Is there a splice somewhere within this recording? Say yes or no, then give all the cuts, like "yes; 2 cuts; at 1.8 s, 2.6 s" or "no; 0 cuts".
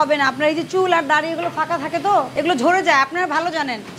no; 0 cuts